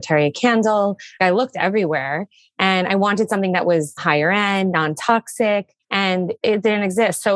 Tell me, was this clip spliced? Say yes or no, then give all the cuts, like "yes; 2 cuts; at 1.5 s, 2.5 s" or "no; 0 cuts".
yes; 2 cuts; at 1.2 s, 4.0 s